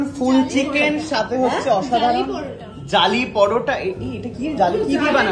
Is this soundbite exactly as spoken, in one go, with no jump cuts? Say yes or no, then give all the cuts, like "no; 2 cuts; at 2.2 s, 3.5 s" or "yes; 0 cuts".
yes; 0 cuts